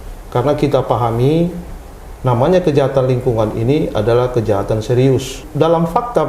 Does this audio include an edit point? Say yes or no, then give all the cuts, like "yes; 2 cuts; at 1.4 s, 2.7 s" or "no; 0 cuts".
yes; 1 cut; at 5.4 s